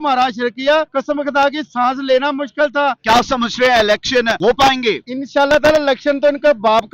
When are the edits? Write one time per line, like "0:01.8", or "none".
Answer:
0:00.9
0:03.0
0:04.3
0:05.1